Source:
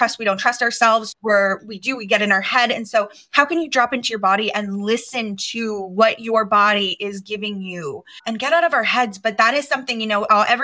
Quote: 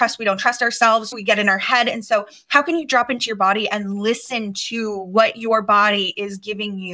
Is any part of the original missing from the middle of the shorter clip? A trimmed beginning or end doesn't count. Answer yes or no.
yes